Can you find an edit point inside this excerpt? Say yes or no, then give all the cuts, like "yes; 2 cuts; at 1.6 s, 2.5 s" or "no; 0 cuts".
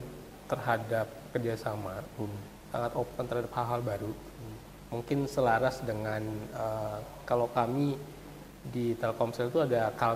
no; 0 cuts